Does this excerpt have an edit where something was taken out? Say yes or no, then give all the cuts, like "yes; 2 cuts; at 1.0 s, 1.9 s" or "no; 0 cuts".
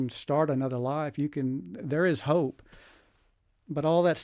no; 0 cuts